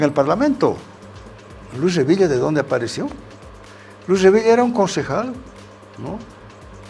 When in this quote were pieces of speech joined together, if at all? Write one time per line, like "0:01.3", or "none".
0:00.9

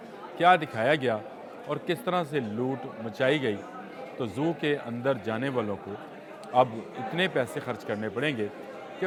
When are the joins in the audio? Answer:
none

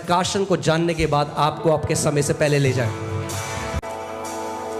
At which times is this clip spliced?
none

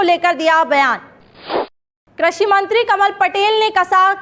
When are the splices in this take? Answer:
0:01.8

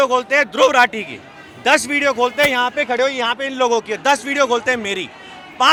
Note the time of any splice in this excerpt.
none

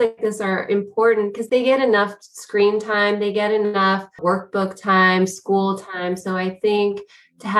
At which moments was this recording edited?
0:01.4
0:04.2

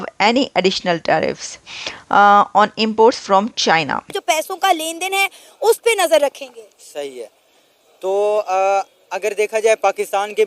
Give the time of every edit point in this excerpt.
0:04.1

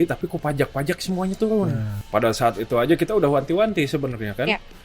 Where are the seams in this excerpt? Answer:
0:01.9

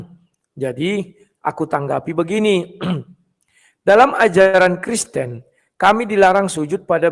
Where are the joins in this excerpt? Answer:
none

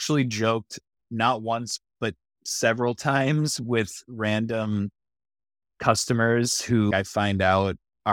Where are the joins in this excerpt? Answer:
0:06.9

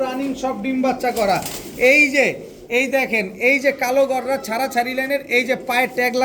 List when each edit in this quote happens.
none

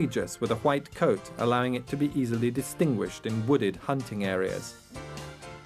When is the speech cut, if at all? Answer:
0:01.4

